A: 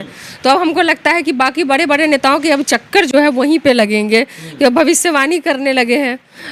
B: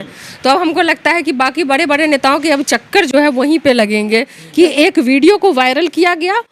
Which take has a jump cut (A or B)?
B